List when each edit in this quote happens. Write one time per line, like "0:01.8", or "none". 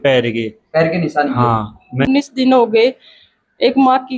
0:02.0